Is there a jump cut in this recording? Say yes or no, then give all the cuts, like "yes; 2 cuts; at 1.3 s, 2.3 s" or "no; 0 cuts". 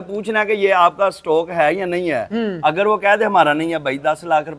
no; 0 cuts